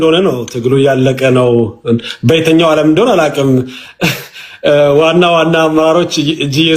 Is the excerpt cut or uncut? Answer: uncut